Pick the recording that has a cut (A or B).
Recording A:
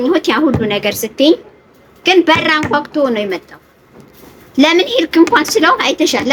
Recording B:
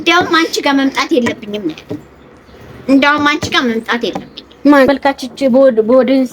B